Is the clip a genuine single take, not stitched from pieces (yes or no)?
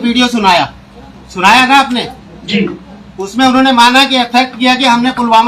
yes